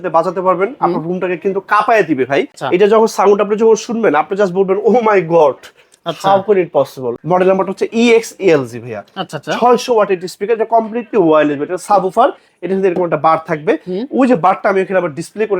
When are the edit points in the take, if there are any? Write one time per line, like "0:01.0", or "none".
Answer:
0:02.6
0:07.1